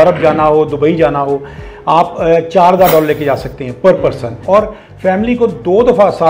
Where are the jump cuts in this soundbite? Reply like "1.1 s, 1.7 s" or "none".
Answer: 4.4 s